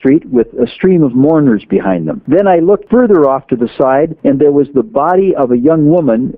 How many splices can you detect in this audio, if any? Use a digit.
3